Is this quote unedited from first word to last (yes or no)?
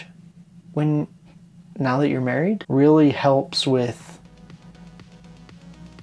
no